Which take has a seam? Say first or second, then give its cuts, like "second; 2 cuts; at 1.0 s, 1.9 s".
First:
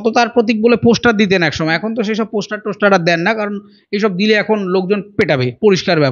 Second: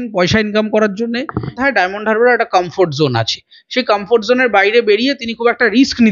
second; 1 cut; at 1.6 s